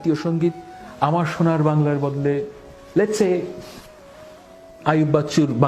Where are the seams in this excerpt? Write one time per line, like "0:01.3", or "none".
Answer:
none

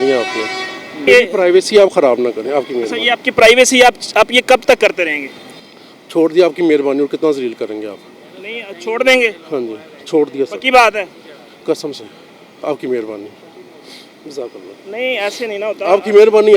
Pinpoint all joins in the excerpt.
0:01.0

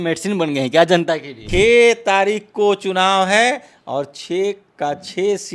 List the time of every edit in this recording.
0:01.3

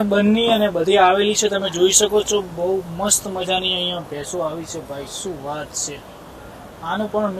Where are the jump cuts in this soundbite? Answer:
none

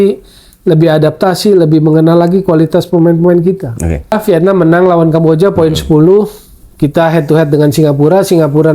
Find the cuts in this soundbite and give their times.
0:04.1

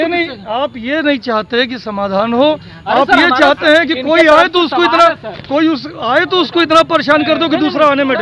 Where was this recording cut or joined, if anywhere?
none

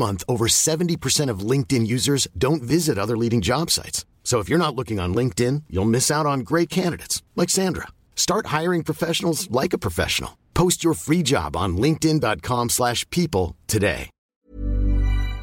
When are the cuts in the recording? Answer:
0:14.2

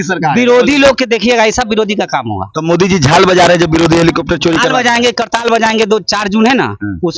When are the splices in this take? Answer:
none

